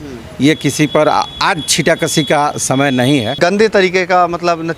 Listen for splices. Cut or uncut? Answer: cut